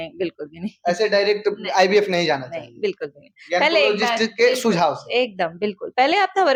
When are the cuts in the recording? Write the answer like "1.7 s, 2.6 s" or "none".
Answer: none